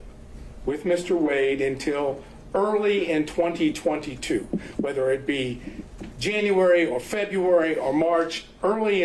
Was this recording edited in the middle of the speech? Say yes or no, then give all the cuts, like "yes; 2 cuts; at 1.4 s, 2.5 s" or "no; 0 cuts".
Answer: no; 0 cuts